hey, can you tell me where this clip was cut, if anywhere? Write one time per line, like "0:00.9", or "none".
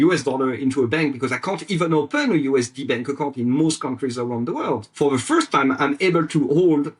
0:04.9